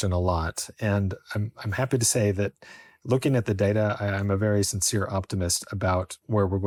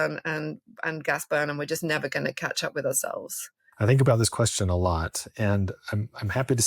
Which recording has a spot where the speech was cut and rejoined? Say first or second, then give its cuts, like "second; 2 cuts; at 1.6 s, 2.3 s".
second; 1 cut; at 3.6 s